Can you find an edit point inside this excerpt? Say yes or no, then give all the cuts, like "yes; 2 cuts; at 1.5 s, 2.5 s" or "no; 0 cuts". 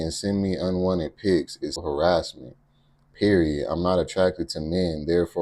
yes; 1 cut; at 1.8 s